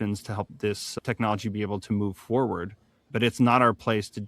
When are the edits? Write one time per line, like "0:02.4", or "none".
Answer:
0:03.1